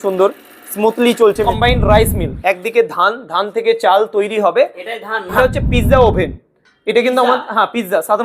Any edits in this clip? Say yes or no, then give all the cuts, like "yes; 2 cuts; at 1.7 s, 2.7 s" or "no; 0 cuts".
yes; 2 cuts; at 1.5 s, 5.4 s